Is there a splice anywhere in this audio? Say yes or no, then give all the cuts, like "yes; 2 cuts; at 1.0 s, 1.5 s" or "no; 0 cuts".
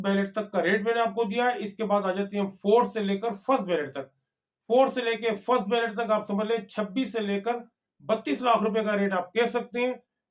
no; 0 cuts